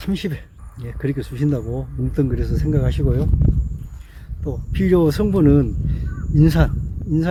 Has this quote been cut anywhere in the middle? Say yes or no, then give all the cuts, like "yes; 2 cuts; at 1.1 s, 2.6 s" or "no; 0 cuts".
no; 0 cuts